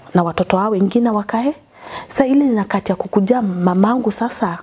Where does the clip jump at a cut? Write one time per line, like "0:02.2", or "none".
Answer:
none